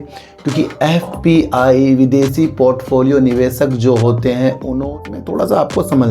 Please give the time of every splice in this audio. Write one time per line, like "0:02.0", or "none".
0:04.9